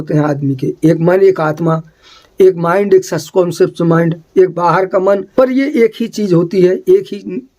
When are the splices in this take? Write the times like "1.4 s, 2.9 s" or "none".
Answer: 5.3 s